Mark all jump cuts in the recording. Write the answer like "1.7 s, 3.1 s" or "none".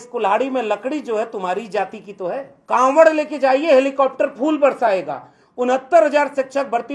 2.5 s